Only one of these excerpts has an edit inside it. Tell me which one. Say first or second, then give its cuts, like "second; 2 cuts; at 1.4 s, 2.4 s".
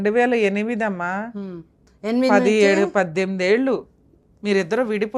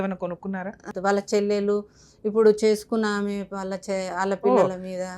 second; 1 cut; at 0.9 s